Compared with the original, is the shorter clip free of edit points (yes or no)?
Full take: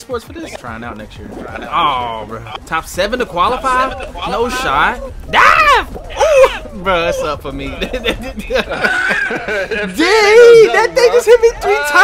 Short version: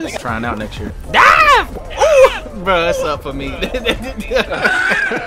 no